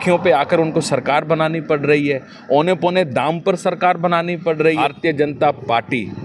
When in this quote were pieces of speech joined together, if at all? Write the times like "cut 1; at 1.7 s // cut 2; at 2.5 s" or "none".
cut 1; at 4.8 s

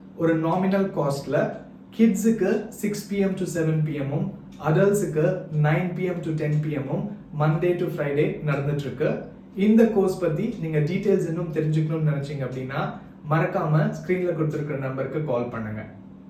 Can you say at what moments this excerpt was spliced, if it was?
none

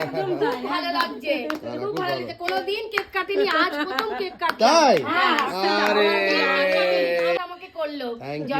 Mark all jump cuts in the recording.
cut 1; at 7.4 s

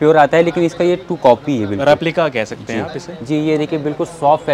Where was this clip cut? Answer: none

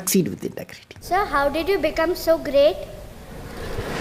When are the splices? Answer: cut 1; at 1.0 s

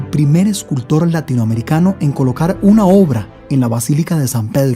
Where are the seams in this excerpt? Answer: cut 1; at 3.3 s

